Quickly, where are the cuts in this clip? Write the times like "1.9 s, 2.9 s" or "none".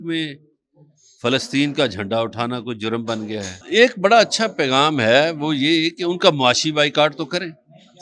3.6 s